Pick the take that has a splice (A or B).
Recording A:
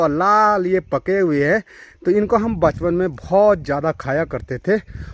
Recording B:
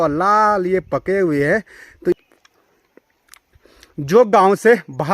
B